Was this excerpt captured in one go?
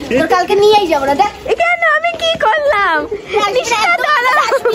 yes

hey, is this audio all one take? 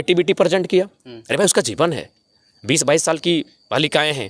yes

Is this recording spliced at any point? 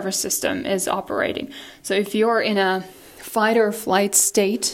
no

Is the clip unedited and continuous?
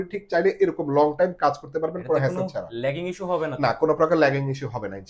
yes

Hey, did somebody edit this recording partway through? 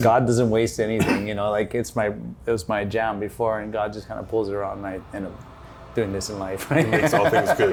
no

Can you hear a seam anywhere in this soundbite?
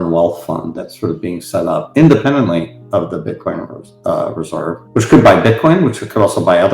yes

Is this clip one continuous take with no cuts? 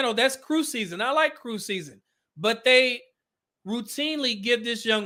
yes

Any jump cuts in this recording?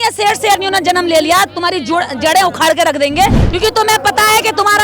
yes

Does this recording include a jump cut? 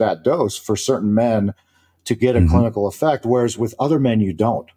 no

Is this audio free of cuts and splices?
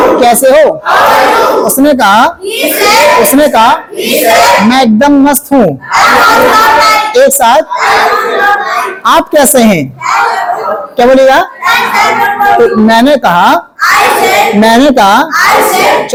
yes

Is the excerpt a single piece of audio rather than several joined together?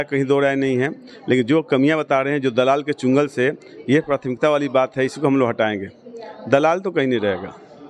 yes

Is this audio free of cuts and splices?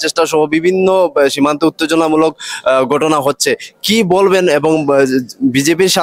yes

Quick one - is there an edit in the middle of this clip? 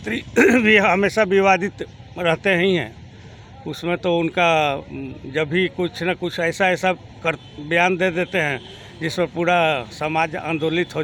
no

